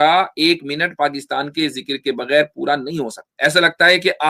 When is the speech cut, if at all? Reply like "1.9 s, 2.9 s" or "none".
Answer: 3.2 s